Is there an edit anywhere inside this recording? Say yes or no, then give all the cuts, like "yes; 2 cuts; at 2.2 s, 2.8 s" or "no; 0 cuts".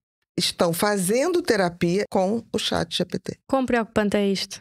yes; 2 cuts; at 2.1 s, 3.3 s